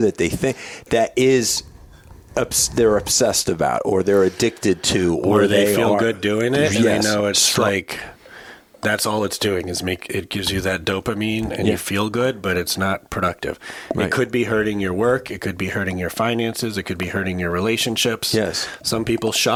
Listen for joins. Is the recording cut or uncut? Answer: uncut